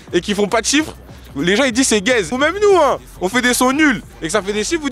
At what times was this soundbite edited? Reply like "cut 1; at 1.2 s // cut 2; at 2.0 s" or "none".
cut 1; at 2.3 s